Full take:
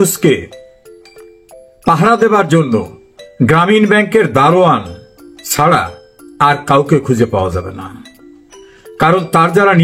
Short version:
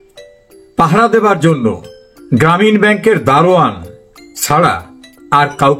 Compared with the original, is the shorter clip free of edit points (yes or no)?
yes